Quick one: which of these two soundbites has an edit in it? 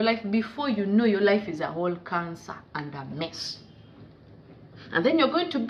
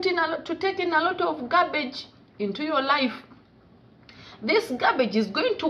first; 1 cut; at 4.5 s

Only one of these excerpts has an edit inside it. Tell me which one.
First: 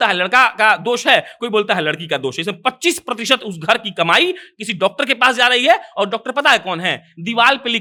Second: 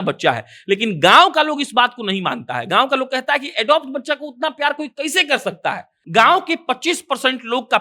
second; 1 cut; at 6.0 s

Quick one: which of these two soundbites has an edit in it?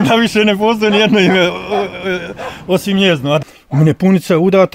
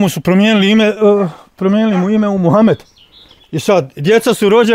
first; 1 cut; at 3.4 s

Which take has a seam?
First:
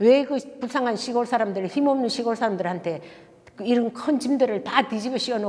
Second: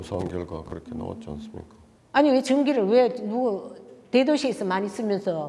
second; 1 cut; at 1.8 s

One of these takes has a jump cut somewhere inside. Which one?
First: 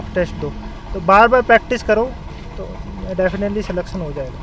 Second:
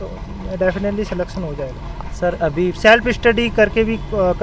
second; 1 cut; at 2.8 s

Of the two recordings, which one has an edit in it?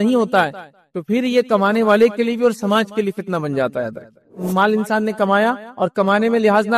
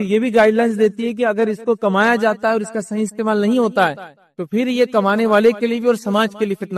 first; 1 cut; at 4.3 s

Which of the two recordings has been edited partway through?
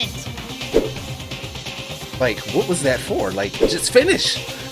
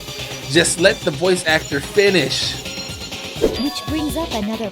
second; 1 cut; at 3.5 s

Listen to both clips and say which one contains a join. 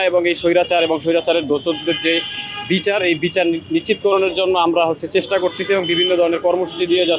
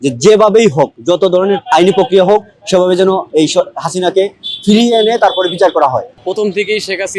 second; 1 cut; at 6.1 s

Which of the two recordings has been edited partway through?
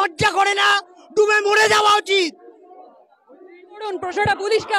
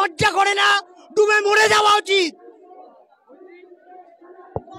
first; 1 cut; at 3.9 s

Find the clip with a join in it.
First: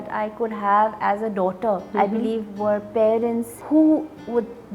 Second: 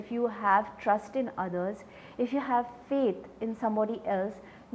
first; 2 cuts; at 1.9 s, 3.5 s

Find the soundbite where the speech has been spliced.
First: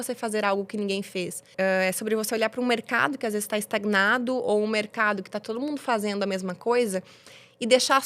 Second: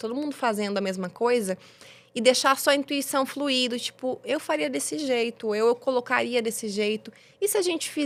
first; 1 cut; at 1.5 s

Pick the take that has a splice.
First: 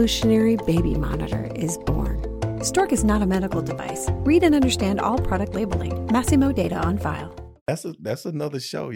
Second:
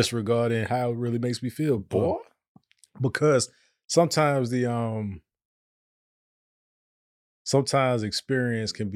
first; 1 cut; at 7.7 s

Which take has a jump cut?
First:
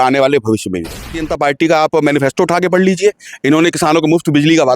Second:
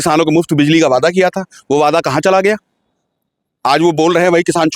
first; 1 cut; at 1.2 s

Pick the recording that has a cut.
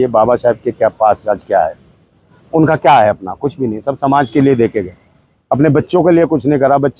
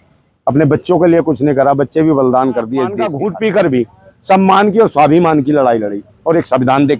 second; 1 cut; at 3.1 s

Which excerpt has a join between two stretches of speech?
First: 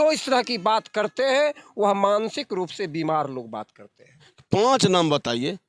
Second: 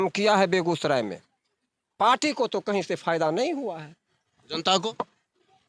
first; 1 cut; at 4.2 s

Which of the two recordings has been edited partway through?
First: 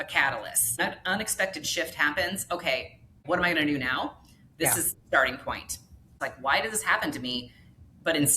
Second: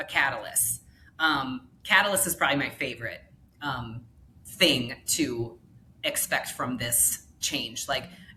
first; 3 cuts; at 0.8 s, 3.2 s, 6.3 s

